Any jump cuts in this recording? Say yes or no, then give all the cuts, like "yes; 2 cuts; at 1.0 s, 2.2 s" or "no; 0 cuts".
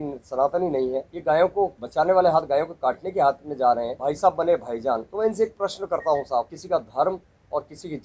yes; 5 cuts; at 1.1 s, 1.8 s, 3.9 s, 5.1 s, 6.6 s